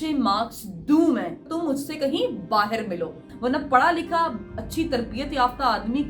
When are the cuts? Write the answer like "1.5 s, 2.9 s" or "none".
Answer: 1.4 s, 3.3 s